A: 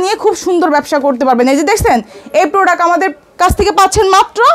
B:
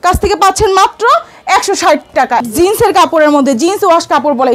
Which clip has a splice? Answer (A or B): B